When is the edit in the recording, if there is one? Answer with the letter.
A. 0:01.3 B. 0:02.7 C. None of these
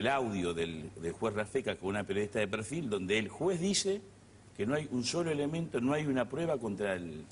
B